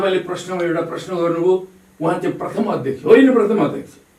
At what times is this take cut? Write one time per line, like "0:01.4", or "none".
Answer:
none